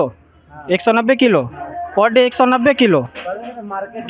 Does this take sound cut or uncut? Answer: uncut